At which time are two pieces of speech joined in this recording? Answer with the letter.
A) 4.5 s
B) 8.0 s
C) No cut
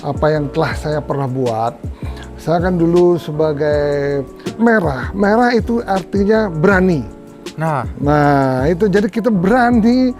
A